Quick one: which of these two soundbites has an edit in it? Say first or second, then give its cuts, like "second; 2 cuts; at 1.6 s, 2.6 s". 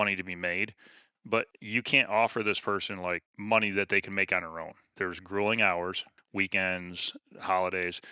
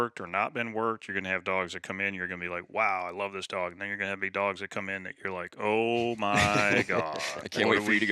first; 4 cuts; at 1.5 s, 3.3 s, 4.9 s, 6.1 s